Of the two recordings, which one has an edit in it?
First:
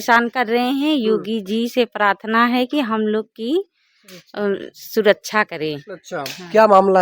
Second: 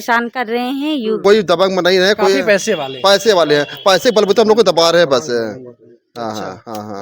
second; 1 cut; at 1.2 s

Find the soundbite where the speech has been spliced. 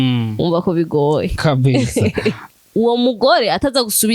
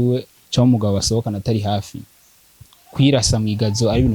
first; 1 cut; at 2.4 s

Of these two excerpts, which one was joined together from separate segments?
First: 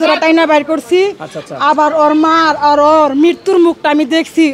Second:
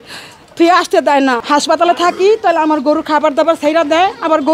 second; 1 cut; at 1.4 s

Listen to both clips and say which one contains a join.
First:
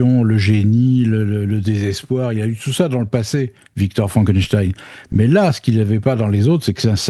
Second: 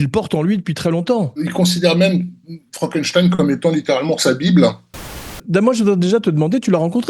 second; 2 cuts; at 1.4 s, 5.3 s

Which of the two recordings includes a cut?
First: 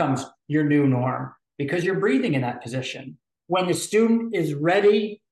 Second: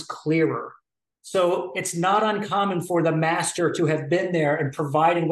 first; 1 cut; at 3.3 s

